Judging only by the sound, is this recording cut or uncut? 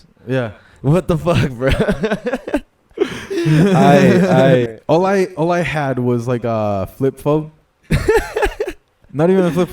cut